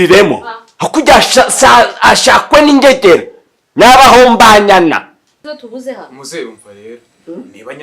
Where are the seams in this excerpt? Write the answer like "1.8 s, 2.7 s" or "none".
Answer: 5.4 s